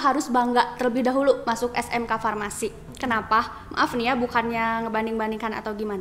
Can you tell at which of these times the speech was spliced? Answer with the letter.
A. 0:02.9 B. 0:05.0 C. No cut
C